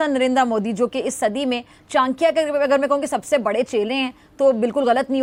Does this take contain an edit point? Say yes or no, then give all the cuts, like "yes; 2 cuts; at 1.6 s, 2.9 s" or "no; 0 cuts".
no; 0 cuts